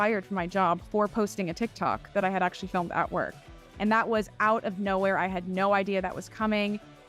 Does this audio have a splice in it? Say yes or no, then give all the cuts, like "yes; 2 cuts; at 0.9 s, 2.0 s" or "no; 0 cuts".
no; 0 cuts